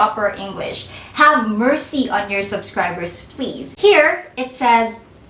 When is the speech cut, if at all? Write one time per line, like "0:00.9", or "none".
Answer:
0:03.7